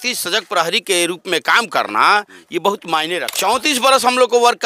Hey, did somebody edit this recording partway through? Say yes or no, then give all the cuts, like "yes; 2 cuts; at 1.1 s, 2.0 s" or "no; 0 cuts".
yes; 1 cut; at 3.3 s